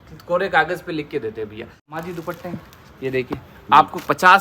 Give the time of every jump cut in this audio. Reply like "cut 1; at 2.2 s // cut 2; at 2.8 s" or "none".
cut 1; at 1.9 s